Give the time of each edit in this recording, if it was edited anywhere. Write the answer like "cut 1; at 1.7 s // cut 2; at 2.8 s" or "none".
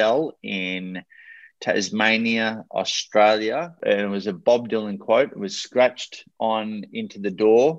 cut 1; at 3.8 s